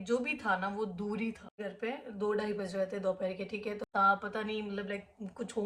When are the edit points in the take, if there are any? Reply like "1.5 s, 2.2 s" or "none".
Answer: 1.5 s, 3.8 s

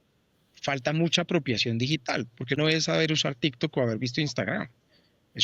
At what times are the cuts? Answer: 2.6 s

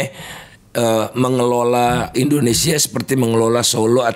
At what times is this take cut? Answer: 2.1 s

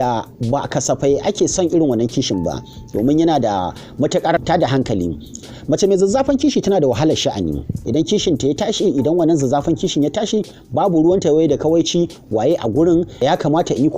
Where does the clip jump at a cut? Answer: 4.4 s, 7.7 s, 13.2 s

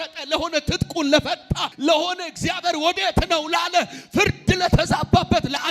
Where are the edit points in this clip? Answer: 1.6 s

